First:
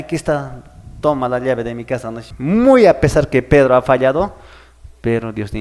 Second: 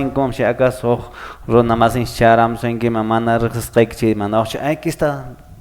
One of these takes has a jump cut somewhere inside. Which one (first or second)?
first